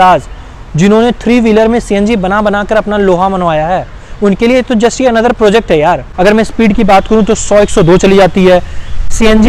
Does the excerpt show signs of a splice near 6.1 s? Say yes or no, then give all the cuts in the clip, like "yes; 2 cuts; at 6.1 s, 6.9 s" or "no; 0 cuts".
yes; 1 cut; at 6.1 s